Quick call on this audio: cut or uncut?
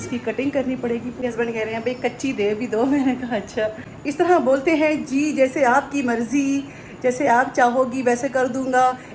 cut